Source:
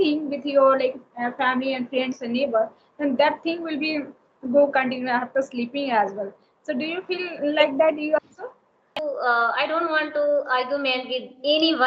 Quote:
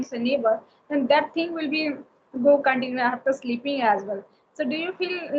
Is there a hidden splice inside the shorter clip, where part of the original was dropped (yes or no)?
no